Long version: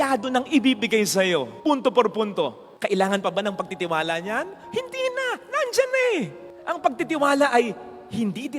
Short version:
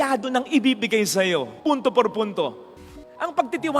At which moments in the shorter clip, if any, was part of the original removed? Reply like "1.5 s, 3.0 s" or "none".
2.8 s